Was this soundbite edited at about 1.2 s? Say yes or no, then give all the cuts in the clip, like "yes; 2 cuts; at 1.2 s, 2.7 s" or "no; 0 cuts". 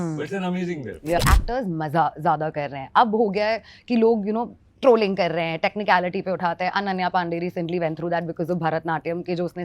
yes; 1 cut; at 1.2 s